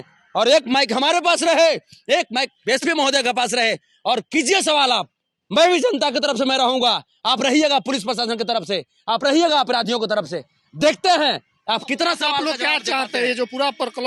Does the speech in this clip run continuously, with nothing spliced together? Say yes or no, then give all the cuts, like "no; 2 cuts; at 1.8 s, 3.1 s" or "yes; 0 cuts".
yes; 0 cuts